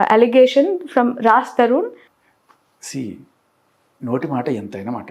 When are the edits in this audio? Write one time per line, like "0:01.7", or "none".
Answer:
0:02.1